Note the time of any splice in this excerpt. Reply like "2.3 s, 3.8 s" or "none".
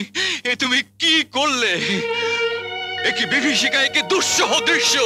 none